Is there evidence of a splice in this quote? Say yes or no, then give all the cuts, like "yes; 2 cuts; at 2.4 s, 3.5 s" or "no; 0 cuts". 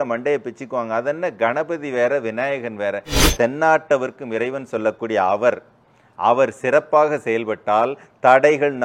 yes; 1 cut; at 3.2 s